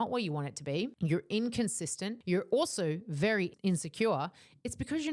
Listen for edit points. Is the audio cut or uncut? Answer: cut